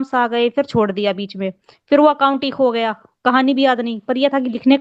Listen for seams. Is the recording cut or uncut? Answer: uncut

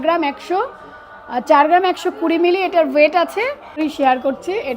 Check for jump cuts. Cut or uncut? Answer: cut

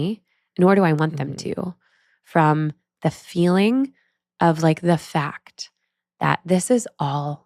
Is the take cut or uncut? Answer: uncut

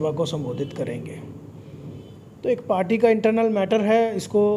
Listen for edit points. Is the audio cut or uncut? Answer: uncut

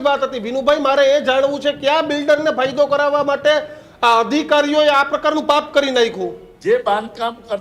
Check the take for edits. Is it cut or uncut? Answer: cut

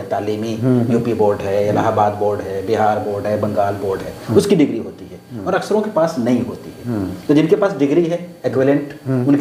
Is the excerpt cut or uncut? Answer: uncut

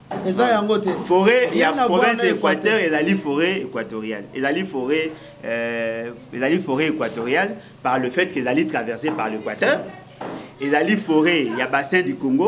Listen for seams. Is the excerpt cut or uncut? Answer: uncut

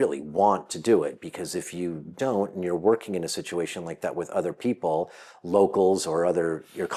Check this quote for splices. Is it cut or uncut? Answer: uncut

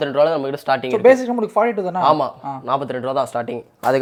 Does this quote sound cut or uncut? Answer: uncut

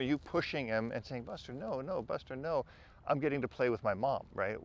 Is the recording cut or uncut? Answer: uncut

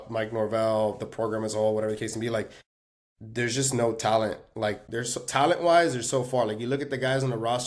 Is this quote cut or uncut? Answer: cut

